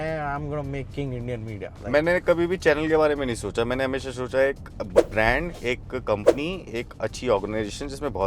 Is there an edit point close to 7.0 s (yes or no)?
no